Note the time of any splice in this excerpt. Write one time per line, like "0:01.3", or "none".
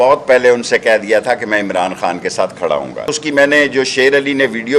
0:03.1

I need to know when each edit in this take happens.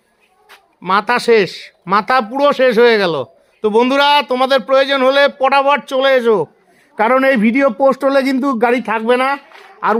none

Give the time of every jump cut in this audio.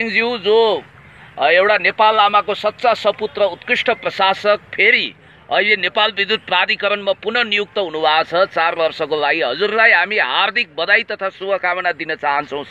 none

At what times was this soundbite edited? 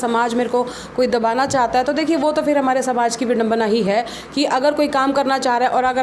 none

